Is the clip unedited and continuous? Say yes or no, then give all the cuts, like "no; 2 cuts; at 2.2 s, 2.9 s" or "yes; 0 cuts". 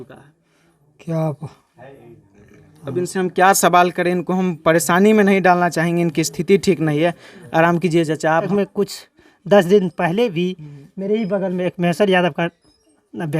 no; 1 cut; at 8.5 s